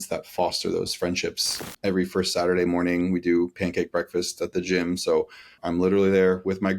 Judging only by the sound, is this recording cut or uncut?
cut